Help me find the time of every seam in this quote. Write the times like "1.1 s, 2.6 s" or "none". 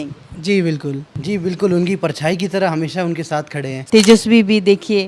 1.1 s, 3.8 s